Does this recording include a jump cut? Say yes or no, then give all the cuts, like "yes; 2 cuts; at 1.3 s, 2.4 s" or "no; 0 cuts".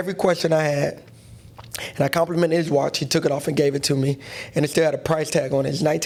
no; 0 cuts